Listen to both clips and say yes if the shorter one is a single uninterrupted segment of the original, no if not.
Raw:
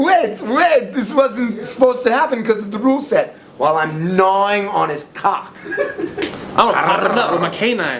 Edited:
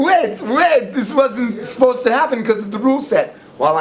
yes